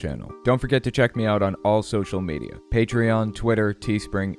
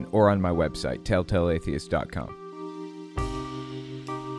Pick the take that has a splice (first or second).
second